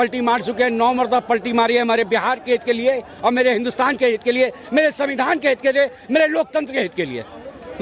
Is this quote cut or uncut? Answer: uncut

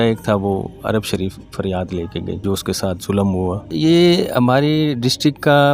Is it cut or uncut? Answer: cut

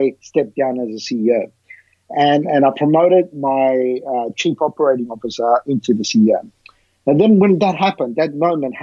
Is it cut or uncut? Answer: uncut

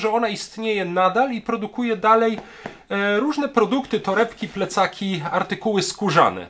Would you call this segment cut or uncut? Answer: uncut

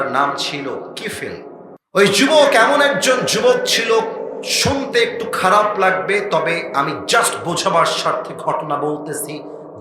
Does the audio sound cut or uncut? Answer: cut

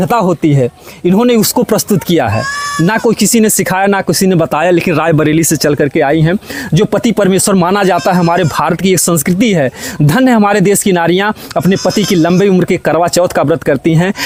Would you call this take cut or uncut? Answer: uncut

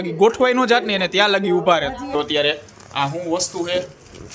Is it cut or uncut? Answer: cut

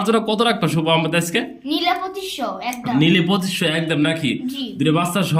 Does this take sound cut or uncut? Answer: uncut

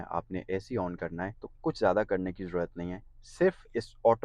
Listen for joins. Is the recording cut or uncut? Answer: cut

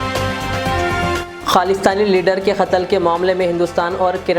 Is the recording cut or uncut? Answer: cut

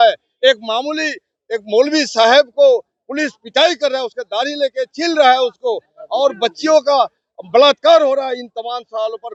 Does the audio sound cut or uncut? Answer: uncut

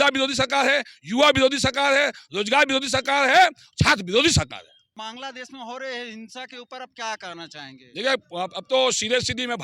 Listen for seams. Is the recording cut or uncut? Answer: cut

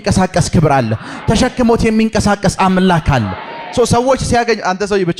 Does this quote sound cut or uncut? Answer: uncut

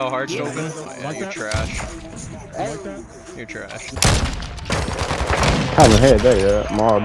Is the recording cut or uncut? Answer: cut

